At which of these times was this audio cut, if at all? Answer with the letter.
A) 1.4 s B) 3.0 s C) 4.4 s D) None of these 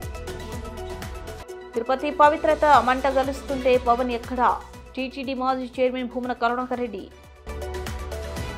A